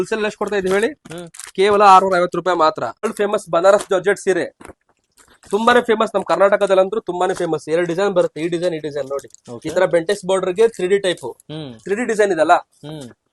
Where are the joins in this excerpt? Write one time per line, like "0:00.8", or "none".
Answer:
none

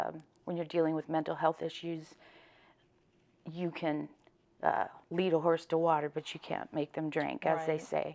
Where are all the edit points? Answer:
none

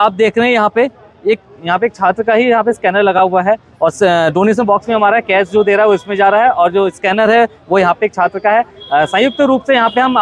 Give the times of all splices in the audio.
none

